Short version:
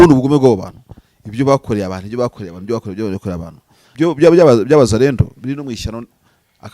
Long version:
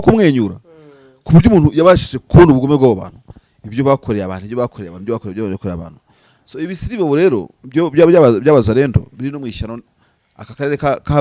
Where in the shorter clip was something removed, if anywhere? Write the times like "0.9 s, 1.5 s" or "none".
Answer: 3.8 s